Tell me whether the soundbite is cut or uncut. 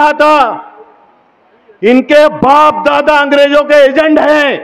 uncut